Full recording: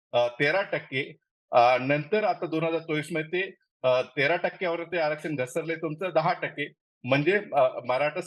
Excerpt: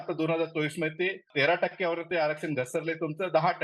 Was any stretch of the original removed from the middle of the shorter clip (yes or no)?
yes